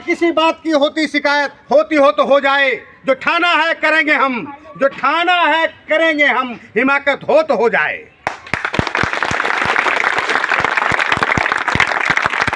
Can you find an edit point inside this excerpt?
no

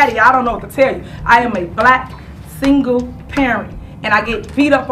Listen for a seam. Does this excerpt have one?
no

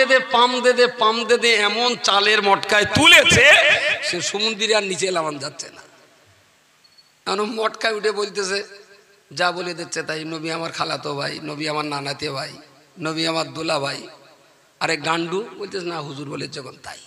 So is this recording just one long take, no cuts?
yes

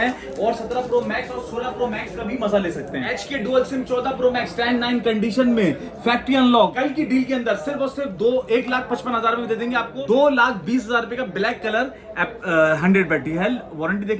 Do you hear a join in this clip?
yes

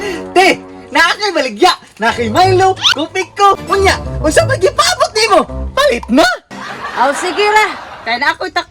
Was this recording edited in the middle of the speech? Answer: yes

